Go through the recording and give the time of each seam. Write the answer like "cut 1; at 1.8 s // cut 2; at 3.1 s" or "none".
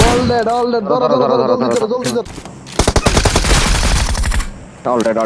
cut 1; at 2.2 s